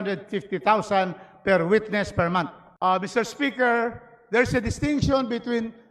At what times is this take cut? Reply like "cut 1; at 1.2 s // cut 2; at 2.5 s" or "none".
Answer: cut 1; at 2.6 s